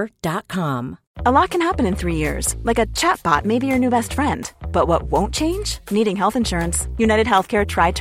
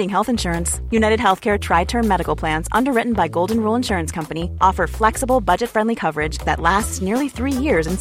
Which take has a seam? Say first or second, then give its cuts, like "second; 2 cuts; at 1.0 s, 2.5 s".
first; 1 cut; at 1.0 s